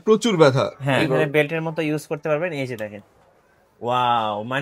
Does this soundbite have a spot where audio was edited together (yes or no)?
yes